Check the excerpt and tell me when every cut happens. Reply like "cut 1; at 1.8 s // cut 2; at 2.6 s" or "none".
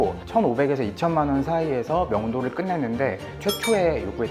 cut 1; at 3.3 s